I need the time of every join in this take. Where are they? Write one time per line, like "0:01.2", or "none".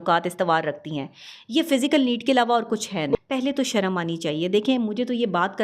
0:03.2